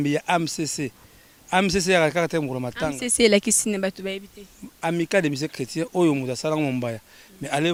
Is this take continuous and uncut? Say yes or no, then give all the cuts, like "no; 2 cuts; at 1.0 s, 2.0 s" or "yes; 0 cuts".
yes; 0 cuts